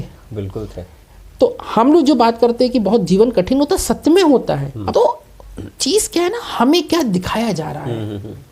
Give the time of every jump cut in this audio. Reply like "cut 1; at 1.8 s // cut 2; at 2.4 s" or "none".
cut 1; at 4.7 s